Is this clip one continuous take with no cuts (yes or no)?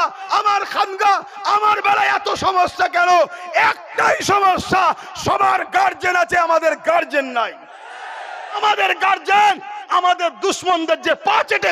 no